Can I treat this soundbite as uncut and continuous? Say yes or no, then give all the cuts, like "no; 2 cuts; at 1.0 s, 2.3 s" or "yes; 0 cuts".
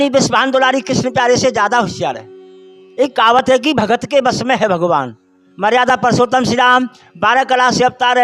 yes; 0 cuts